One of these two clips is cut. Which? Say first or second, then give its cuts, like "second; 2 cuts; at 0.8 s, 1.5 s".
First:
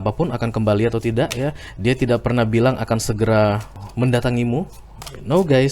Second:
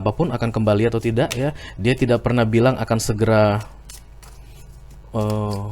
first; 1 cut; at 3.8 s